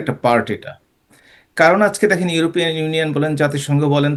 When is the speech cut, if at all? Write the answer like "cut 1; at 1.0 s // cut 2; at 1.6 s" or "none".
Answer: none